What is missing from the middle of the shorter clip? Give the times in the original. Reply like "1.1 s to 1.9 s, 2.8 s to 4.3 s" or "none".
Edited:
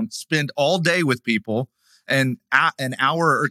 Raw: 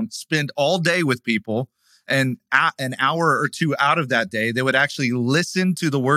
none